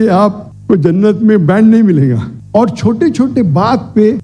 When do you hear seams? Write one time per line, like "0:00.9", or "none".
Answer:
0:02.3